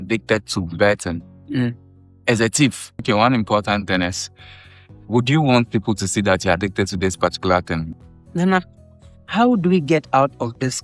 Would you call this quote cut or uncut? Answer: cut